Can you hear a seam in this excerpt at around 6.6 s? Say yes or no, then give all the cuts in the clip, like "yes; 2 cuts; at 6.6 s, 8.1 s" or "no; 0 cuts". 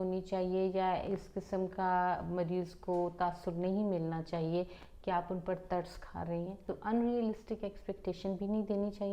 yes; 1 cut; at 6.6 s